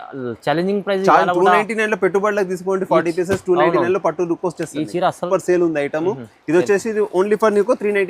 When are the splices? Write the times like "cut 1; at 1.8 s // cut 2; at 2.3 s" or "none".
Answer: cut 1; at 5.2 s